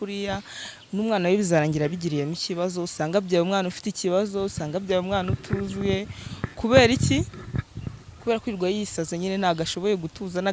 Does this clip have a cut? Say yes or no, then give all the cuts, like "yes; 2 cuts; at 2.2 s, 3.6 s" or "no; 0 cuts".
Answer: no; 0 cuts